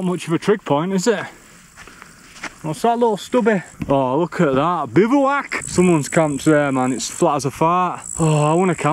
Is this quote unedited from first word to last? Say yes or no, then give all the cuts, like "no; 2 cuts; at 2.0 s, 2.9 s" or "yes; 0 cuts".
no; 2 cuts; at 3.7 s, 5.5 s